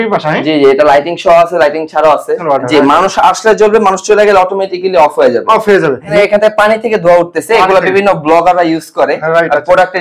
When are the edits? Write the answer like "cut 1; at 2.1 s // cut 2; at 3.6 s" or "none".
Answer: cut 1; at 2.4 s // cut 2; at 6.1 s